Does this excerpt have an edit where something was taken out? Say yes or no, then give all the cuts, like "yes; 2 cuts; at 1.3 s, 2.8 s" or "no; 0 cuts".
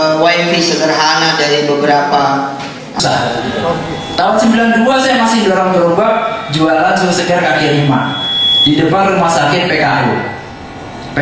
yes; 1 cut; at 3.0 s